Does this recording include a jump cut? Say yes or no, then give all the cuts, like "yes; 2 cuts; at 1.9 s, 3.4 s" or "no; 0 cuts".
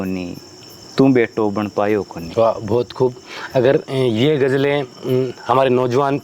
no; 0 cuts